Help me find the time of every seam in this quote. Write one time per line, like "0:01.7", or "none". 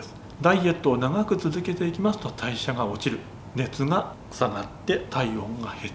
0:04.2

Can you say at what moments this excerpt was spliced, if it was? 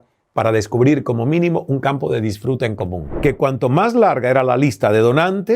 0:03.0

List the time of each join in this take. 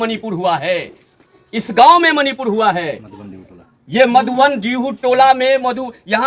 none

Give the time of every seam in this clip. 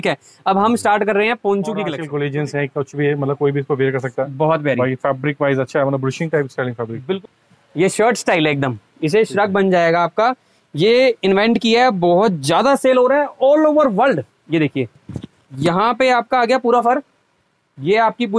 0:02.0
0:07.2

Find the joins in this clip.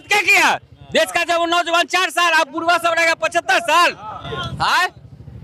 none

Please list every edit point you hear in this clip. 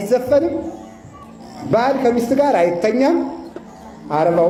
none

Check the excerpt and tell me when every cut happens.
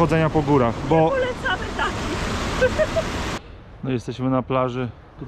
0:03.4

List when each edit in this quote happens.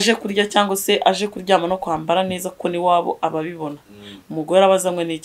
none

